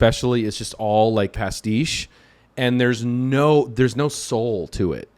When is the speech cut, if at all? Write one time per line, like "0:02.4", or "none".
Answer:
0:01.4